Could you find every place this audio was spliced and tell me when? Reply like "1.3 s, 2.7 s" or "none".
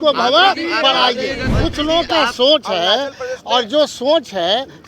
1.5 s